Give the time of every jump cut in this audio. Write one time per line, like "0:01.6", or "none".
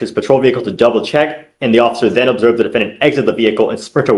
none

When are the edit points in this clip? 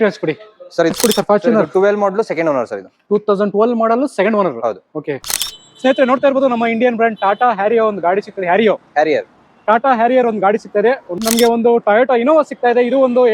0:00.9
0:05.2
0:11.2

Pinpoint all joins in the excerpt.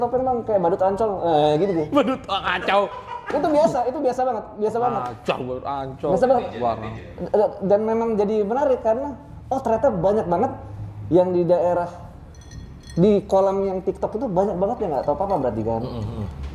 none

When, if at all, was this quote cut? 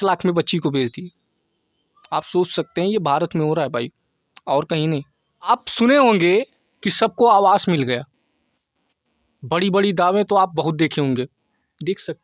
0:05.5

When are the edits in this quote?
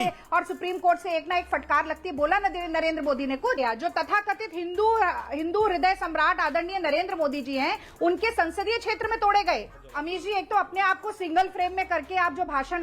0:03.6
0:09.8

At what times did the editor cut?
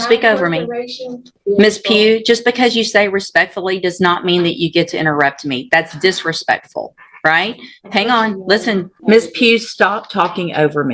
0:01.3
0:08.9

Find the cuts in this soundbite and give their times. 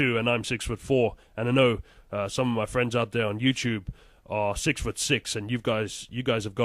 0:04.5

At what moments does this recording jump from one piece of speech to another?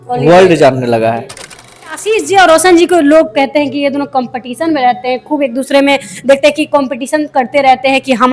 0:02.0

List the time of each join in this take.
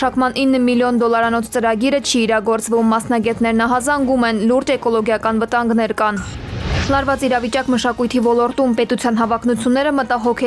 0:06.8

